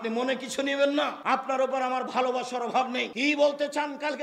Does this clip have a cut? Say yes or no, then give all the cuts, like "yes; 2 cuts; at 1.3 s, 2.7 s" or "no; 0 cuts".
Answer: yes; 2 cuts; at 1.2 s, 3.1 s